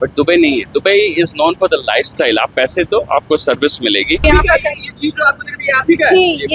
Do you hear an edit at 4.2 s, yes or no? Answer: yes